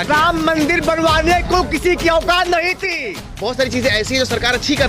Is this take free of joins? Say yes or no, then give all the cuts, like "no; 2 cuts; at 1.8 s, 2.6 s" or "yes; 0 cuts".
no; 1 cut; at 2.9 s